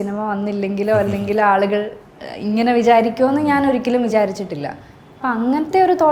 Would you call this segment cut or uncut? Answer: uncut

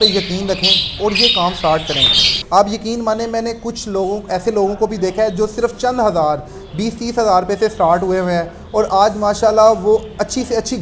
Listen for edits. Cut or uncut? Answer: uncut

